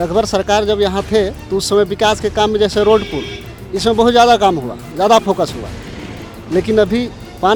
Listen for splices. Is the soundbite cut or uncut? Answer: uncut